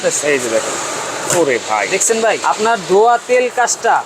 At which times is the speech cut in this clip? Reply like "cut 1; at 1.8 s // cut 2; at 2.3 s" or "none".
cut 1; at 2.4 s